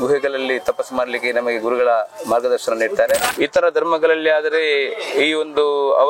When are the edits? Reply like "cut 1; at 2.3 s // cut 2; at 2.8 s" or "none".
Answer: cut 1; at 3.3 s